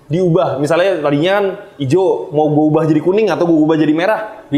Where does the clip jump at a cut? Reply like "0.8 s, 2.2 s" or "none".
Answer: none